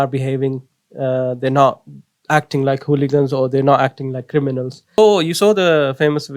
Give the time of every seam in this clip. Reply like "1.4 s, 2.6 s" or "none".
5.0 s